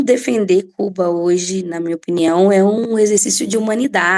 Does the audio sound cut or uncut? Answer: uncut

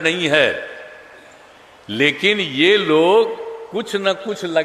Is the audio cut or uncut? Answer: uncut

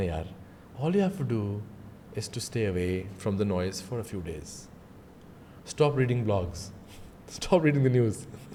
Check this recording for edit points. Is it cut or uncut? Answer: uncut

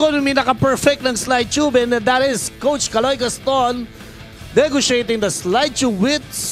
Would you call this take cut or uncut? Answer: uncut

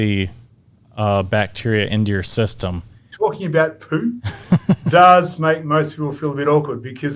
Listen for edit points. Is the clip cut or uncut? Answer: cut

